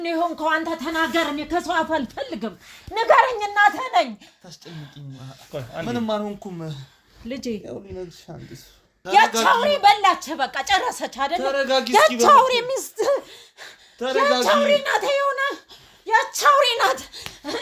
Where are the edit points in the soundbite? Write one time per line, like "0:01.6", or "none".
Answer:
0:09.0